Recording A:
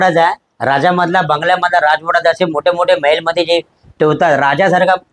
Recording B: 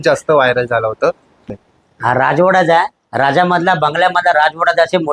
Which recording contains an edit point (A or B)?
B